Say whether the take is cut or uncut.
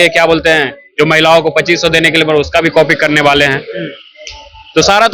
uncut